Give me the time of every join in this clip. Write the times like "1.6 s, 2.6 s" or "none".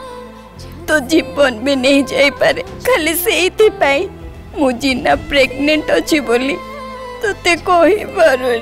2.7 s